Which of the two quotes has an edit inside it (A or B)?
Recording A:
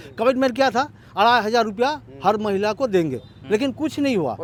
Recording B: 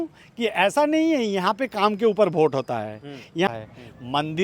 B